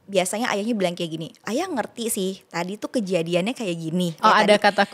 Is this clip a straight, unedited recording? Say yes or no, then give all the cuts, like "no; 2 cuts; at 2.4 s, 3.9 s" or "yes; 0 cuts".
no; 2 cuts; at 1.4 s, 4.2 s